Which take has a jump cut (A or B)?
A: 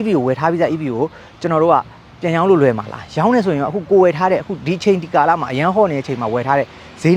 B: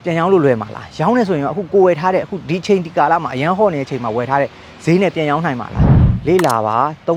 B